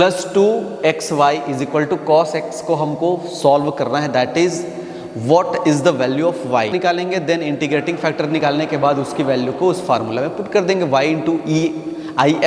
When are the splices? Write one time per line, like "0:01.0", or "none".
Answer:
0:06.7